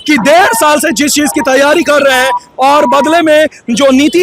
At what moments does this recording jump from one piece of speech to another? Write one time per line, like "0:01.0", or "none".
none